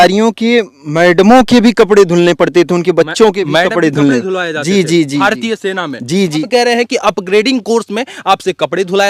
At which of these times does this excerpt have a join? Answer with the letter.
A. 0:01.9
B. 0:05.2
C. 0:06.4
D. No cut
C